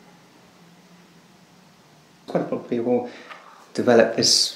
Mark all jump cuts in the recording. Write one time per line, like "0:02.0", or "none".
0:02.3

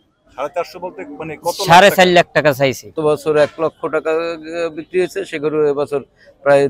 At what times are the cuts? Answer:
0:03.0

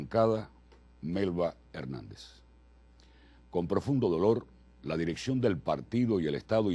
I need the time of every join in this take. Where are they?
0:05.4

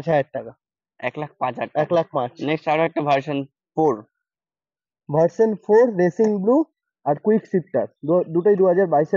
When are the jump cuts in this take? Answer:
none

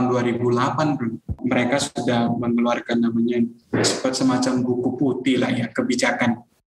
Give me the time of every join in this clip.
0:01.3

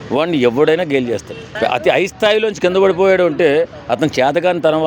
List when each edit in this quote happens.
0:01.4

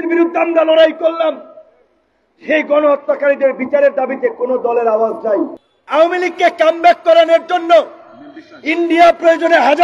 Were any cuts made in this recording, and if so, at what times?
0:05.6

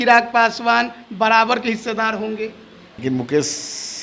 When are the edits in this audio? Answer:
0:02.8

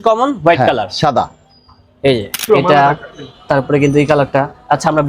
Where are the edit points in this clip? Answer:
0:02.4

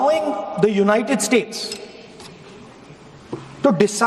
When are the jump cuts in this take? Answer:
0:02.1

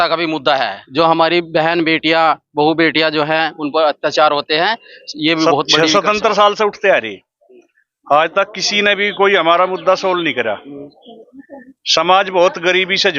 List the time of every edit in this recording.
0:05.6

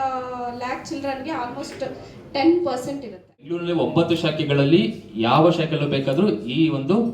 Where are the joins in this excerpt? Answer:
0:03.6

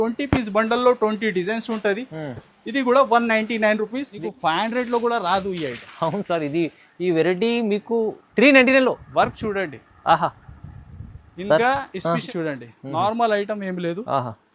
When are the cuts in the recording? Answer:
0:04.1
0:12.3

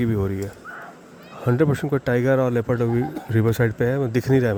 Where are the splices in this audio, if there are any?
none

